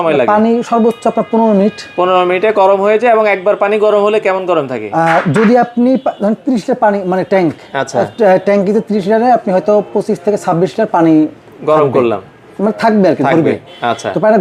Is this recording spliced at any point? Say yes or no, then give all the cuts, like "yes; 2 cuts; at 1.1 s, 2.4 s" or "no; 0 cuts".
no; 0 cuts